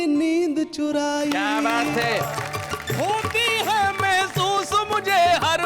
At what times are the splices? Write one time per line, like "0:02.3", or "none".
0:02.3